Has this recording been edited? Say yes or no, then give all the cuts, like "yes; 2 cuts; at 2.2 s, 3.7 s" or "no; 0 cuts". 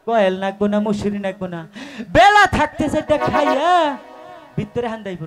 no; 0 cuts